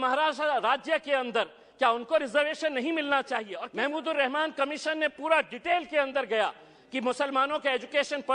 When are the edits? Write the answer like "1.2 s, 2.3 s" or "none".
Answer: 3.6 s